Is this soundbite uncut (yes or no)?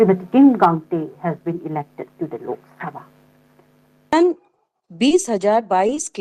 no